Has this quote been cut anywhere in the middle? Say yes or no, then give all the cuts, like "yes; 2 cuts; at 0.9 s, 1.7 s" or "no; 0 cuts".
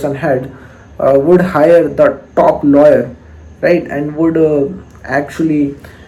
no; 0 cuts